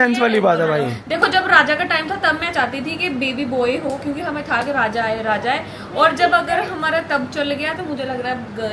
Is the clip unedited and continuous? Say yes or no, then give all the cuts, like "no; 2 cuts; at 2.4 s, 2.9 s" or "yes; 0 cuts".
yes; 0 cuts